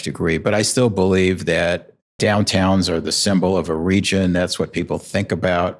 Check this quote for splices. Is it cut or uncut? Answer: cut